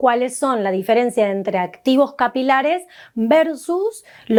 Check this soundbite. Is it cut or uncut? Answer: uncut